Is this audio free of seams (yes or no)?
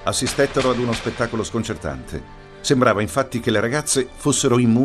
yes